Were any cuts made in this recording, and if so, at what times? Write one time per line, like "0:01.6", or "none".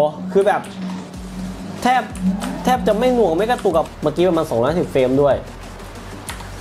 0:03.9